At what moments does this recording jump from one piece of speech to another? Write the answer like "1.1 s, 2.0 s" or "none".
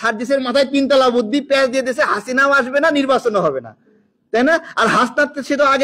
none